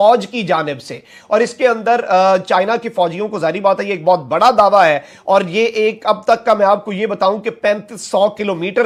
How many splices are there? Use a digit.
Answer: 0